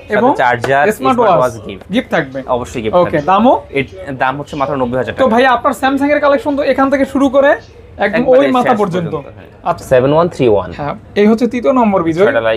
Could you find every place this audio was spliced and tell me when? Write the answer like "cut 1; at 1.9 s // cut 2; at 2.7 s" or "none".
cut 1; at 9.8 s